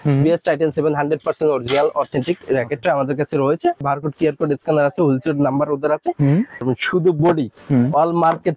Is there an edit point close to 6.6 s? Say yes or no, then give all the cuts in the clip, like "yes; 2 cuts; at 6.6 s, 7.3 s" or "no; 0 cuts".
yes; 2 cuts; at 3.8 s, 6.6 s